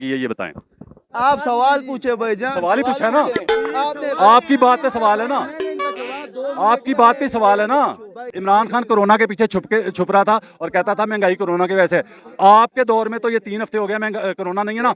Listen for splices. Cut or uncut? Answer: cut